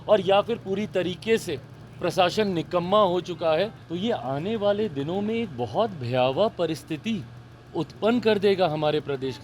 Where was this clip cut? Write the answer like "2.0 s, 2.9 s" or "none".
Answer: 3.8 s